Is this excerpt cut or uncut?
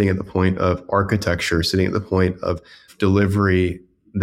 cut